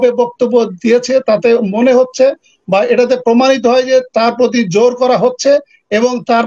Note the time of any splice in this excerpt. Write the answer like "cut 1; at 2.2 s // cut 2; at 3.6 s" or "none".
none